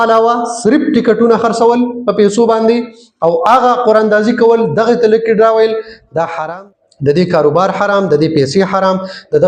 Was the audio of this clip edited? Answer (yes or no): yes